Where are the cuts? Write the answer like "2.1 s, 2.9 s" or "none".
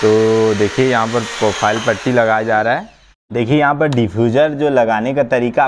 3.1 s